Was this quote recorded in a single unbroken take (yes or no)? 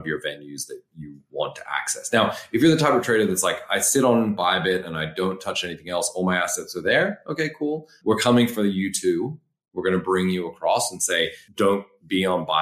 no